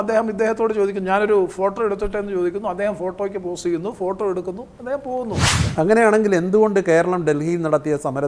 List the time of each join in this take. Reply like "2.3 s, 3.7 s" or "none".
5.5 s